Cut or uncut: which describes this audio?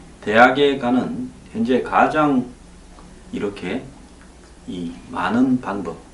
uncut